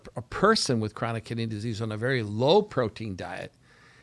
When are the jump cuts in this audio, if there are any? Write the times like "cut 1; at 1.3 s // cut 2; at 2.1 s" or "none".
none